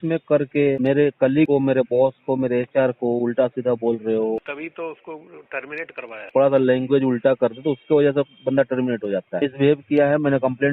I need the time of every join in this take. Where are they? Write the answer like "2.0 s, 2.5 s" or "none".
1.4 s, 4.6 s, 6.3 s, 9.3 s